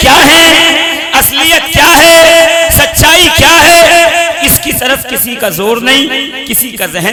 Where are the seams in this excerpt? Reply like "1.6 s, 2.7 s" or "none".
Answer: none